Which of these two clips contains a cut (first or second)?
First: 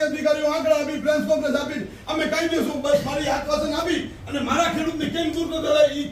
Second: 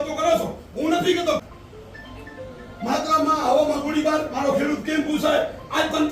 second